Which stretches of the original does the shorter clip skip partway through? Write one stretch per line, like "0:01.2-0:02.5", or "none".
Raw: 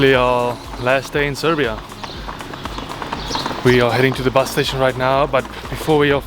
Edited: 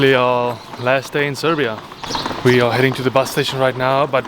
0:02.0-0:03.2